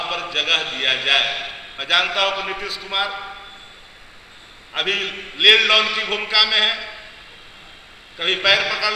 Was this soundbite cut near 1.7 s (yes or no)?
yes